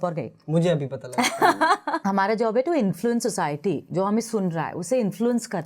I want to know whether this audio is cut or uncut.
cut